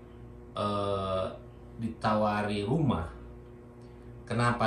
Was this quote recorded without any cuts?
yes; 0 cuts

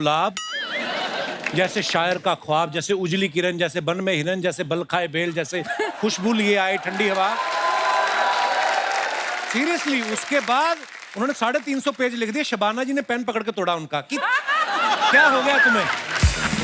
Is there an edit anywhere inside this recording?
no; 0 cuts

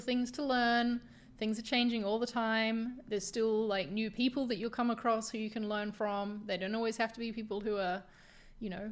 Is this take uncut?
yes; 0 cuts

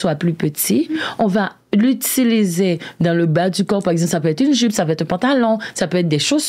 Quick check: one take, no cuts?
yes; 0 cuts

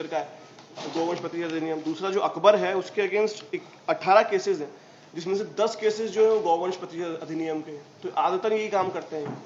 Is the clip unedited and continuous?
yes; 0 cuts

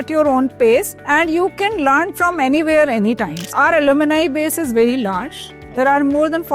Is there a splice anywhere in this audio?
yes; 2 cuts; at 1.0 s, 3.5 s

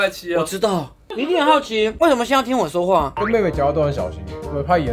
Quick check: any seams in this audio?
yes; 1 cut; at 3.1 s

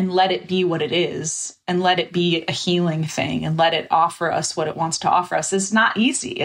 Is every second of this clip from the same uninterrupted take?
yes; 0 cuts

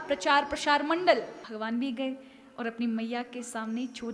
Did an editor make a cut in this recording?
yes; 1 cut; at 1.4 s

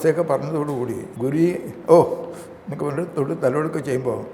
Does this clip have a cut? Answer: yes; 1 cut; at 1.0 s

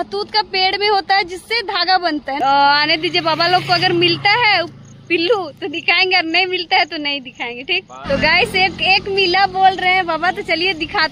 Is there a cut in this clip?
yes; 1 cut; at 2.4 s

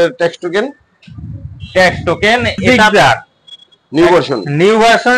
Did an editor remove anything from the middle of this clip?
yes; 1 cut; at 2.7 s

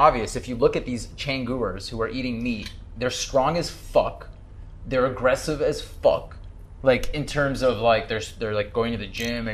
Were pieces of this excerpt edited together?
no; 0 cuts

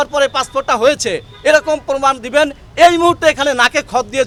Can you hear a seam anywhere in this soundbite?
no; 0 cuts

